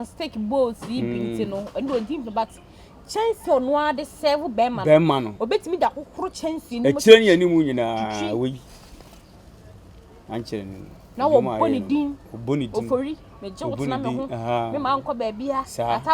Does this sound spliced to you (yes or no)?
no